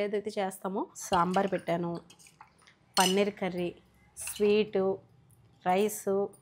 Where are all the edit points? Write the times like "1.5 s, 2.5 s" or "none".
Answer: 0.9 s